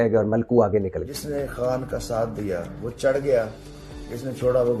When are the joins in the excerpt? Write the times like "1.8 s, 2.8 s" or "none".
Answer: 1.2 s